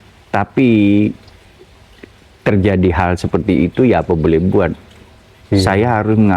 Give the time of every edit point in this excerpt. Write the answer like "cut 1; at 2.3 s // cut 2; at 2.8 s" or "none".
none